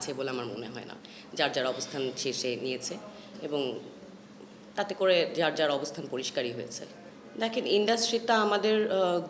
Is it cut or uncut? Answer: uncut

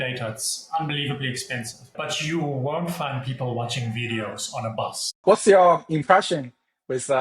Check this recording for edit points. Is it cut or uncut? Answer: cut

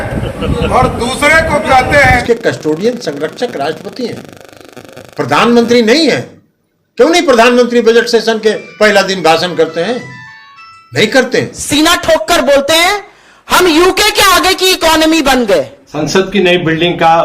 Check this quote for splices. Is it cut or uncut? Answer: cut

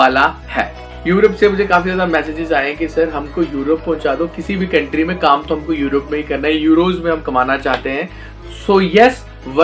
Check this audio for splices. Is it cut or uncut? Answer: cut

